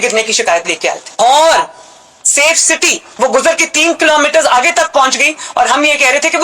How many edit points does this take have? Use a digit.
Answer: 2